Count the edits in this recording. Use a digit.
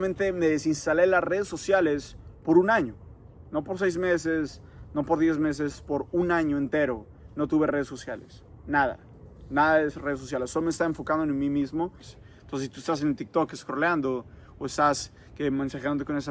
1